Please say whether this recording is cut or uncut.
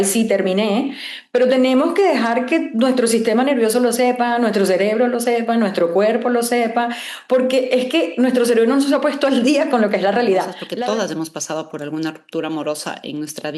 cut